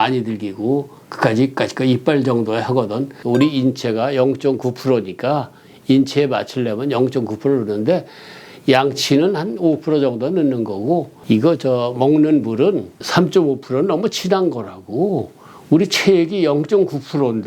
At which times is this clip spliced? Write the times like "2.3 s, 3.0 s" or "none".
3.1 s, 11.1 s, 13.0 s